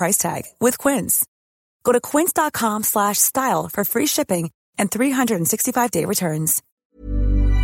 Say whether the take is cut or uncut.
cut